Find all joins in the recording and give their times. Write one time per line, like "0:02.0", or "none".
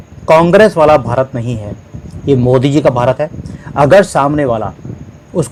none